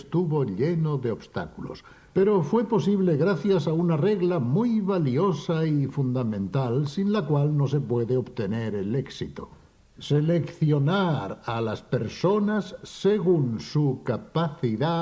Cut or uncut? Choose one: cut